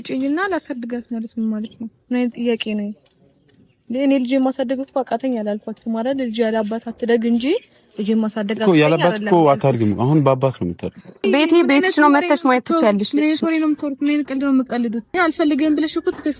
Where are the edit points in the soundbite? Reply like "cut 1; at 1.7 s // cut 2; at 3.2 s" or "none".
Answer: cut 1; at 11.2 s // cut 2; at 15.1 s